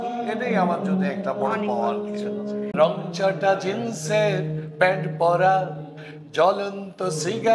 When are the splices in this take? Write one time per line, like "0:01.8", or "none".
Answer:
0:02.7